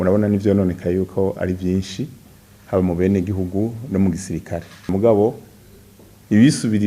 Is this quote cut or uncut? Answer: cut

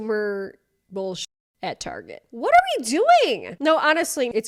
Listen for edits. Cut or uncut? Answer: uncut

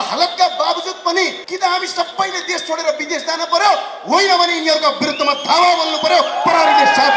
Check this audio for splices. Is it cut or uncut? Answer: cut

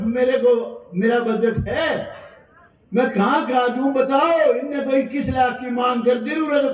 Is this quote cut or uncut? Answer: uncut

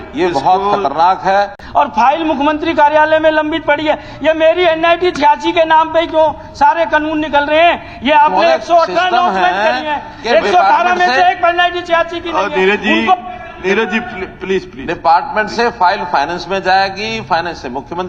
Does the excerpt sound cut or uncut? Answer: cut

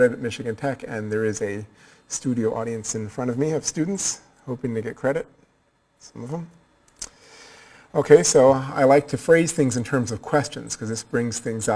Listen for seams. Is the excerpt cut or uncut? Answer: uncut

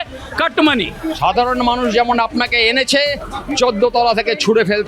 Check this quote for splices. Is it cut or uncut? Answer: cut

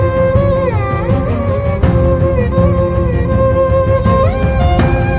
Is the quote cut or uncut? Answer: uncut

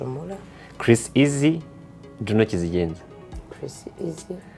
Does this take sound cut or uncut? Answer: uncut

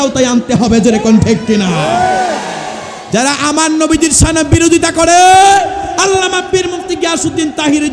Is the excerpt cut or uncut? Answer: uncut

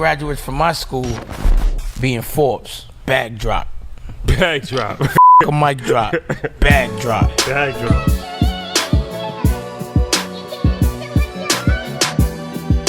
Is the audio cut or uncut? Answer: uncut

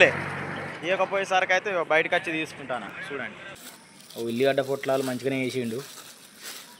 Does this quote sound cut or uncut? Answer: cut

